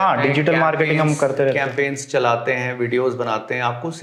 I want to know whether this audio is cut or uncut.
uncut